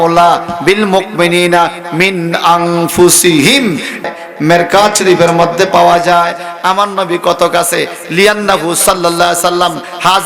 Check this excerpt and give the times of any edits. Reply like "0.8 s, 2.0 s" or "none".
4.0 s